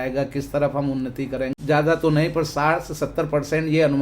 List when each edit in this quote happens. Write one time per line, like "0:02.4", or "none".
0:01.5